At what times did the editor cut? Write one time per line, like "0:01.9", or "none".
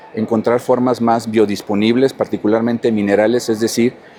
none

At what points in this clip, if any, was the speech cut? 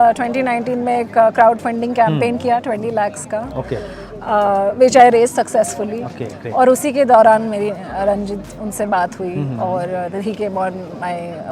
none

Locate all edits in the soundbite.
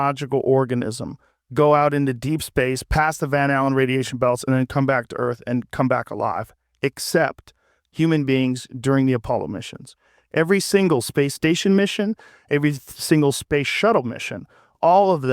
none

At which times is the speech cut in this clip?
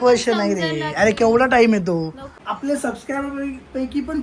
0:02.3

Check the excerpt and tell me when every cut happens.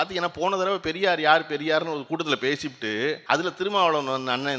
0:03.2

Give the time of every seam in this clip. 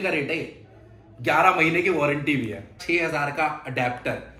0:02.7

